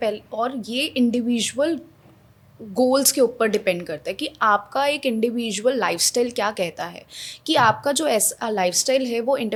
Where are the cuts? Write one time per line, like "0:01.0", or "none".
none